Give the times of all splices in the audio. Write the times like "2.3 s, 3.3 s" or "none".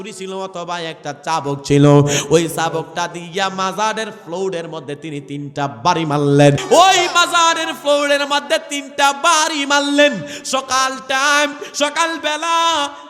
6.6 s